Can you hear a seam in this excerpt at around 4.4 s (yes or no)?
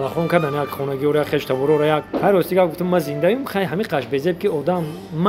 no